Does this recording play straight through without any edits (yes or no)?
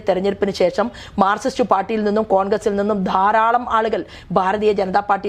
yes